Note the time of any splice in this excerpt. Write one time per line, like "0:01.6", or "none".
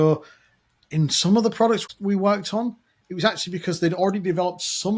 0:01.8